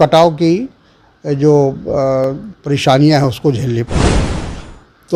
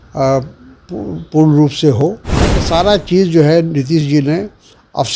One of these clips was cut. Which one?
second; 1 cut; at 2.6 s

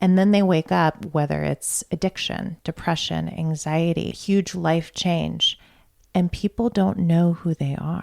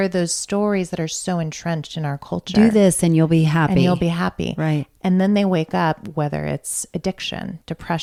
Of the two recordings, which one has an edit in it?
first; 1 cut; at 4.2 s

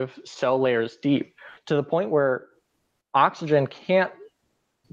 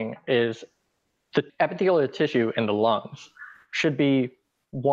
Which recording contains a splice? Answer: second; 1 cut; at 1.5 s

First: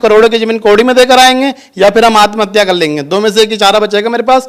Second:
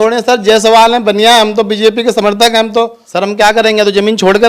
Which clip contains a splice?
second; 1 cut; at 3.0 s

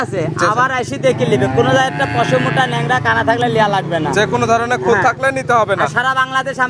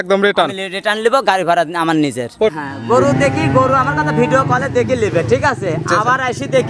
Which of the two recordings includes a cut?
second; 1 cut; at 2.5 s

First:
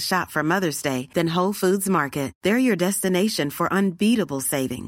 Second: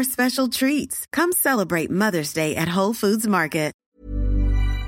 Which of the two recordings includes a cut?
second; 1 cut; at 3.8 s

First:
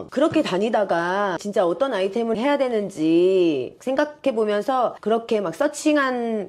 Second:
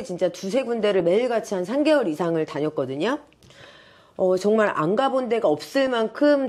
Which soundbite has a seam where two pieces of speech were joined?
first; 3 cuts; at 1.4 s, 3.7 s, 5.0 s

